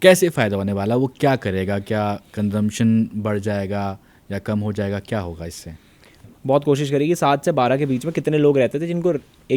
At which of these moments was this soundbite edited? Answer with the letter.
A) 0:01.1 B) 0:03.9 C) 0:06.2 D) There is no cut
C